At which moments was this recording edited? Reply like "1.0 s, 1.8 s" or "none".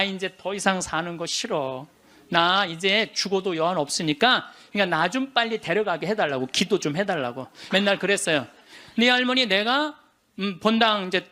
4.6 s, 7.5 s